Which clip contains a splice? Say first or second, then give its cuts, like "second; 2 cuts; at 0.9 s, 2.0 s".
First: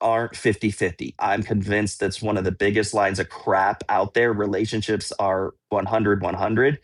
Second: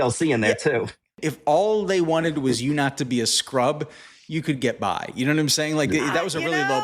second; 1 cut; at 1.3 s